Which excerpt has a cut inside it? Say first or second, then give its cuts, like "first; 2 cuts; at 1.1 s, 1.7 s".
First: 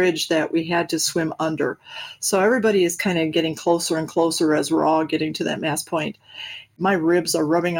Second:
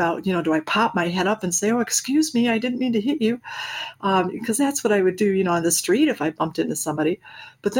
first; 1 cut; at 6.8 s